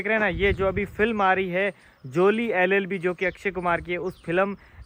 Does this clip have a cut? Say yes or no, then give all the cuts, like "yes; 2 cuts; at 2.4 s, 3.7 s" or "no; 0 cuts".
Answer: no; 0 cuts